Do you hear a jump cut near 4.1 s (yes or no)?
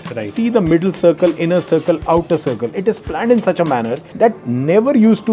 yes